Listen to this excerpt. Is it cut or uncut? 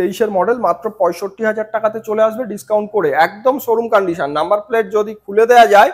uncut